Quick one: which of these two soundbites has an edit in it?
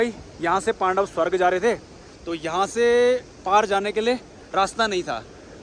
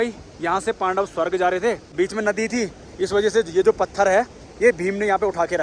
second; 1 cut; at 1.9 s

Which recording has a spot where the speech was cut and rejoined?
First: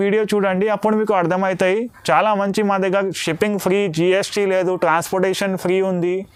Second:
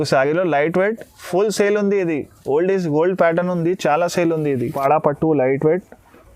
second; 1 cut; at 4.8 s

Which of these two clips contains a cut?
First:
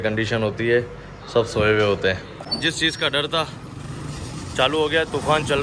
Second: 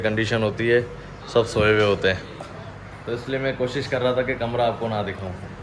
first; 1 cut; at 2.4 s

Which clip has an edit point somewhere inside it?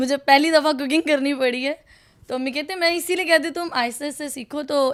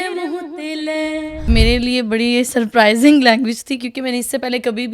second; 1 cut; at 1.5 s

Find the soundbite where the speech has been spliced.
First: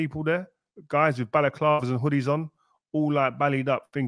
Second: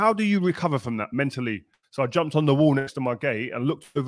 second; 1 cut; at 1.8 s

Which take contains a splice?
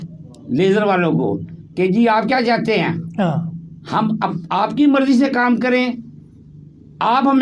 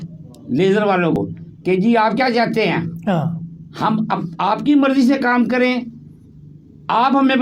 second; 1 cut; at 1.2 s

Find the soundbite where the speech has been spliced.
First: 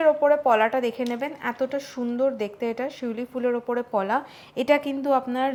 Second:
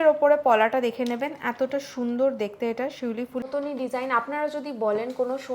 second; 1 cut; at 3.4 s

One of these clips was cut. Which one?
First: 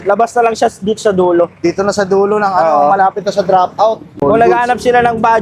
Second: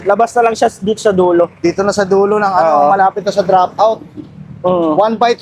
first; 1 cut; at 4.1 s

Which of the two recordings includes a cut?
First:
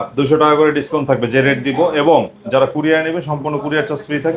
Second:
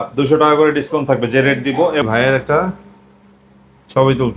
second; 1 cut; at 2.0 s

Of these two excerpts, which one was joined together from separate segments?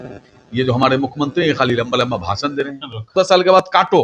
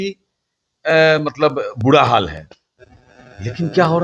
first; 1 cut; at 3.1 s

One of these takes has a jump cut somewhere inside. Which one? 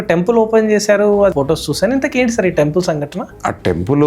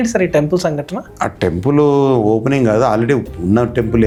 first; 1 cut; at 1.3 s

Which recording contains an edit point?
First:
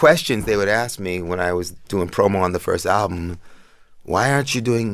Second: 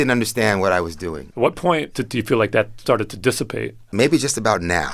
second; 3 cuts; at 1.2 s, 1.9 s, 3.8 s

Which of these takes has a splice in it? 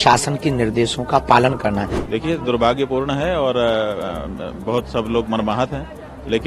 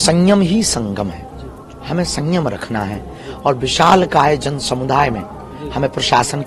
first; 1 cut; at 2.0 s

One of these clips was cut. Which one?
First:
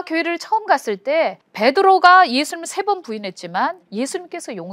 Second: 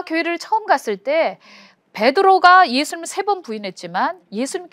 first; 1 cut; at 1.4 s

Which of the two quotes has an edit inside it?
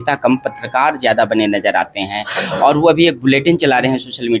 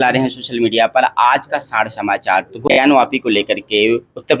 second; 1 cut; at 2.7 s

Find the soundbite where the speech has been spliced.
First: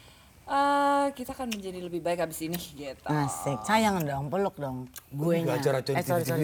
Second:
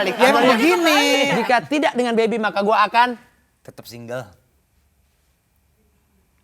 second; 1 cut; at 1.3 s

